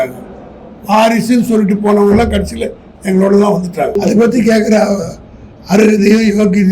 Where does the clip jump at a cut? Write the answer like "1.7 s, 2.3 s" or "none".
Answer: 4.0 s